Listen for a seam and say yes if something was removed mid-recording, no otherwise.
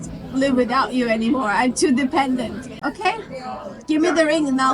yes